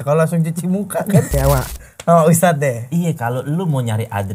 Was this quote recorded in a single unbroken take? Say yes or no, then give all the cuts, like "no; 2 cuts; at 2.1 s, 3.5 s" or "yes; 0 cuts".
no; 1 cut; at 1.4 s